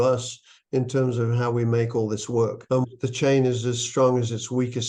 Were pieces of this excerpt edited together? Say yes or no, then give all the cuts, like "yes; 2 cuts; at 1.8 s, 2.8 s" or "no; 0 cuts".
yes; 1 cut; at 2.8 s